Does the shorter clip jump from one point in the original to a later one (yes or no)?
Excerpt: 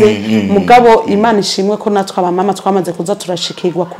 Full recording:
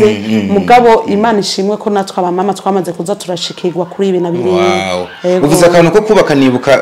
no